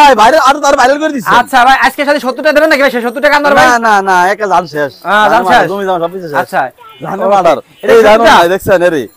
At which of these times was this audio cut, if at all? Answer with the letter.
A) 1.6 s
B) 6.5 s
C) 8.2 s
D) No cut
D